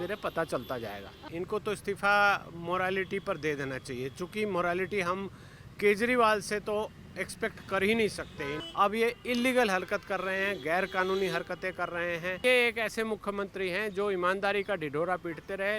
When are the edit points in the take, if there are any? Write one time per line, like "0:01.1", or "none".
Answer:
0:01.2
0:08.6
0:12.4